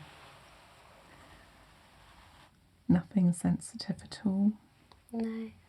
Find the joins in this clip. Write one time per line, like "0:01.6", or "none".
0:02.5